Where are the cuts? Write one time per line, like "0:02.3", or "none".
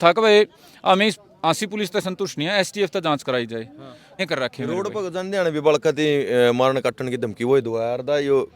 0:04.2